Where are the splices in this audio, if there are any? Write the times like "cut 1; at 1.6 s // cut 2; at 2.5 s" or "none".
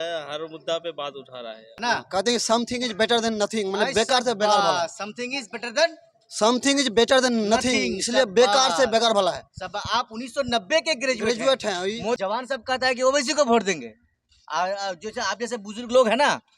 cut 1; at 1.7 s // cut 2; at 12.2 s